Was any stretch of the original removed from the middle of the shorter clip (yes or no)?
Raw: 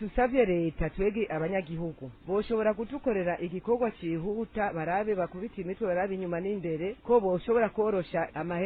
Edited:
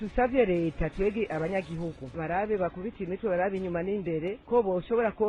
yes